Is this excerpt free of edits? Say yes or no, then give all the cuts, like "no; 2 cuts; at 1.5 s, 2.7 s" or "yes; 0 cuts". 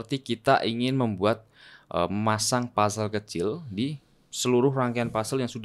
yes; 0 cuts